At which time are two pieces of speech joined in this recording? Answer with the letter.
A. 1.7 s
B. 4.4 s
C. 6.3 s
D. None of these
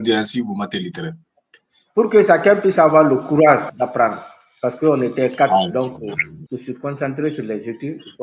C